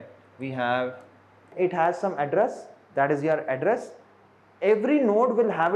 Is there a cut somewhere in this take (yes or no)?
yes